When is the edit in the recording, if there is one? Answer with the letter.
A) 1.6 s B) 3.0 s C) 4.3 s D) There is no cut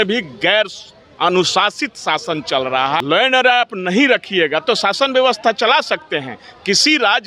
B